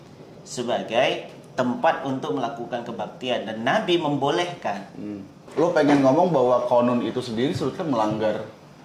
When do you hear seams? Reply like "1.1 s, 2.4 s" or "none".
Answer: 5.4 s

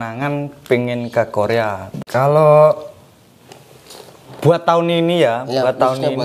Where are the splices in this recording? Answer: 1.8 s

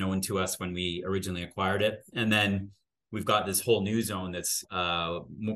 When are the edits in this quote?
2.1 s, 4.6 s

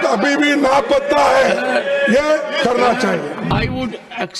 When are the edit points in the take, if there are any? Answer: 3.5 s

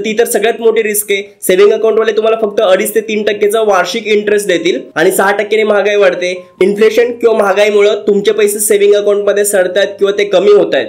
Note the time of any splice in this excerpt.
none

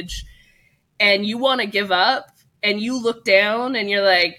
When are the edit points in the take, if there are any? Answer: none

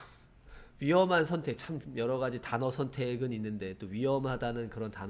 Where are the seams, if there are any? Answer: none

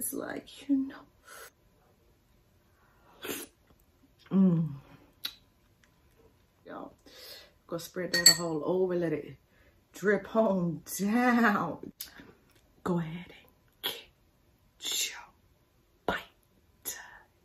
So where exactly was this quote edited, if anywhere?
1.5 s, 6.7 s, 11.9 s

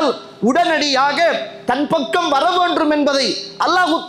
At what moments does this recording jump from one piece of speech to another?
none

